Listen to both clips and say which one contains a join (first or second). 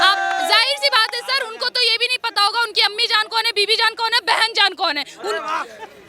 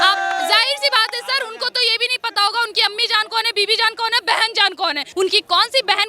second